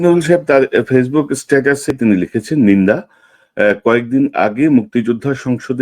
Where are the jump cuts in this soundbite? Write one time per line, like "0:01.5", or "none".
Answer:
0:01.9